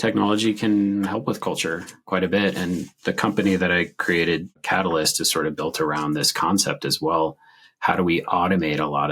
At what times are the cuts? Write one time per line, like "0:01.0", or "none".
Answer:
none